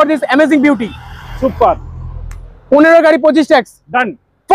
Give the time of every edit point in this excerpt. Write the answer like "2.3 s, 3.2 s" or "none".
none